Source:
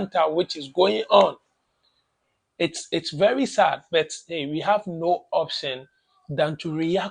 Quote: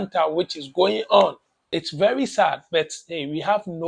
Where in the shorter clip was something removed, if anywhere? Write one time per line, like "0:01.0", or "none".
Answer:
0:01.6